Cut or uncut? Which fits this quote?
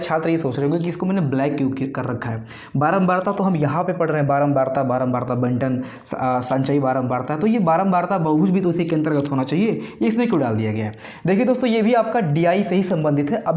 uncut